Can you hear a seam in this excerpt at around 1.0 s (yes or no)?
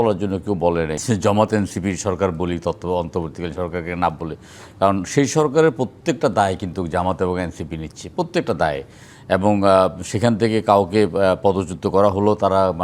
yes